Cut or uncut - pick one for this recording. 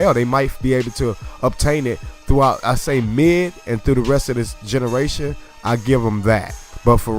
cut